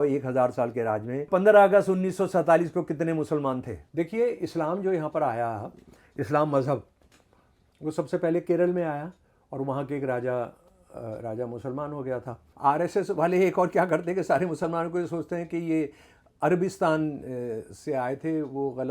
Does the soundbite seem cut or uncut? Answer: cut